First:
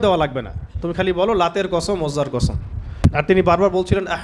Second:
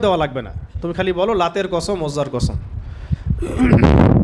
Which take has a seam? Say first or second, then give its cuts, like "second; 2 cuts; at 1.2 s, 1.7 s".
first; 1 cut; at 3.2 s